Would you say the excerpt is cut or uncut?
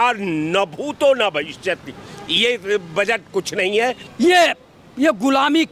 cut